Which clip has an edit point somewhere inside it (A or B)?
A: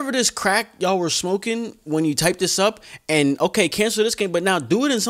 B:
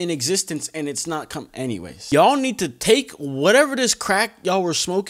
B